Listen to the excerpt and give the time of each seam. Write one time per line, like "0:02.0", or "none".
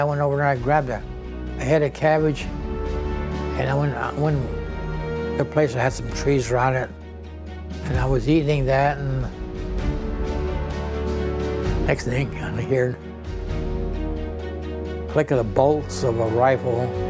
none